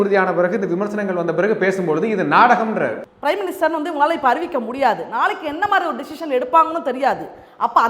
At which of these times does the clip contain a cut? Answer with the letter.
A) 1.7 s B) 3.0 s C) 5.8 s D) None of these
D